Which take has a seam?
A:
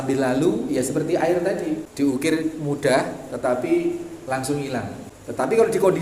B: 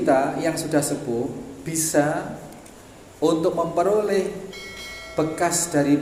A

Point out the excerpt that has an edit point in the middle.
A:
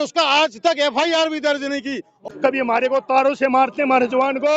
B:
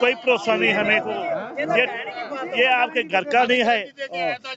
A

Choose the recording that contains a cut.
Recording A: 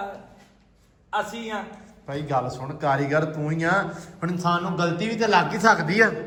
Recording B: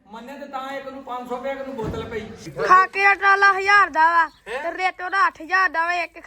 B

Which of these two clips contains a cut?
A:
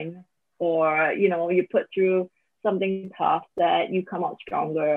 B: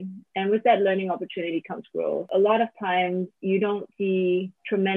B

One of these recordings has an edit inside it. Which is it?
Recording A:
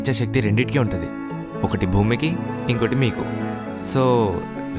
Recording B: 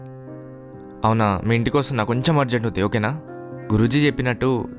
B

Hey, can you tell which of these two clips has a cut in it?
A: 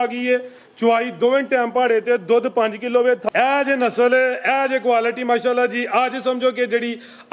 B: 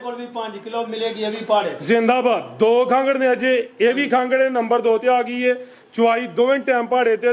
A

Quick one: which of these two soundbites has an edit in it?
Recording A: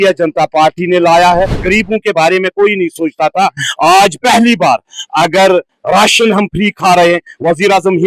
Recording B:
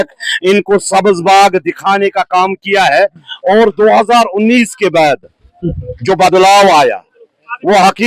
A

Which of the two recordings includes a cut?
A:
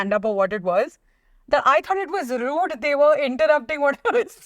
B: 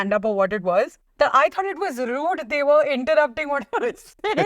B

